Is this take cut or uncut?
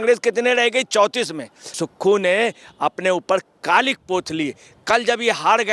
cut